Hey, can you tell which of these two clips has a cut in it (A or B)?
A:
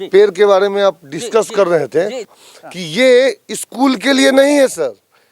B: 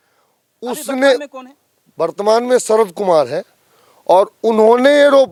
A